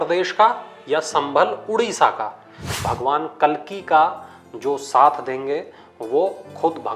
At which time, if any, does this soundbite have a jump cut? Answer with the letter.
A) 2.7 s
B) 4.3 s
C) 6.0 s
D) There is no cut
A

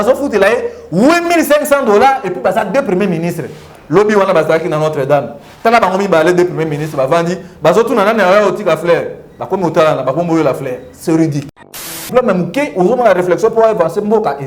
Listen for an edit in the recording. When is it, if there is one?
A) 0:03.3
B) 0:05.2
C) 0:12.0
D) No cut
C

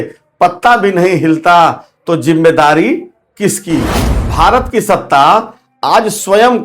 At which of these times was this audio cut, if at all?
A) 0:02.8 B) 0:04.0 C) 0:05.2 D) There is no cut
B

